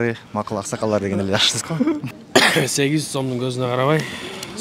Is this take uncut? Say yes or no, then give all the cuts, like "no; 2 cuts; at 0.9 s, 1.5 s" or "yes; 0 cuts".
no; 1 cut; at 2.0 s